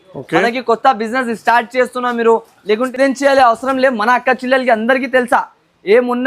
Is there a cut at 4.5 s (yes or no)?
no